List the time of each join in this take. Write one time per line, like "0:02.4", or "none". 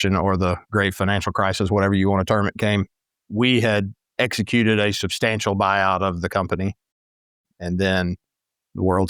none